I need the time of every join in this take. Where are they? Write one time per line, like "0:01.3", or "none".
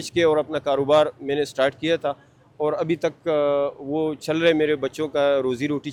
none